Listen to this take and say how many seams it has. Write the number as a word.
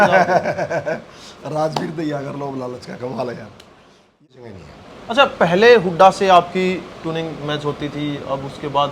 one